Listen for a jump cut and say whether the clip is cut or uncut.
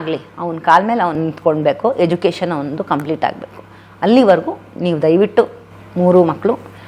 uncut